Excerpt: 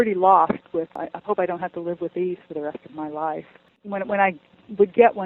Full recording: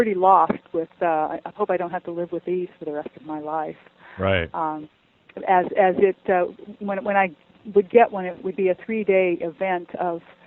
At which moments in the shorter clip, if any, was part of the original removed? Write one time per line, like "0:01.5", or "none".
0:01.0
0:03.7